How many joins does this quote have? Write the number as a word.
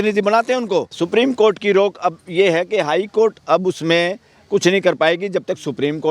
one